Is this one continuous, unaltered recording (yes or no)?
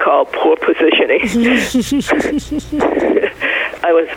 yes